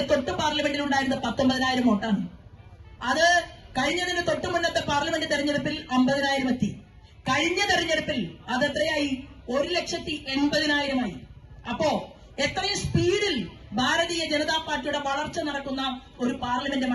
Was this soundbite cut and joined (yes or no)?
no